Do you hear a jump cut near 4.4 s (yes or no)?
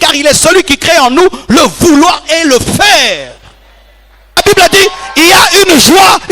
yes